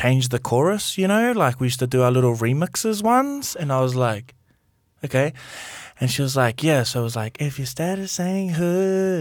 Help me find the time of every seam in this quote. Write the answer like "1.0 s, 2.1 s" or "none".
none